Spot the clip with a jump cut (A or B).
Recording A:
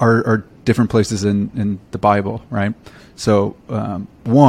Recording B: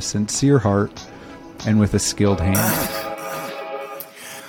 B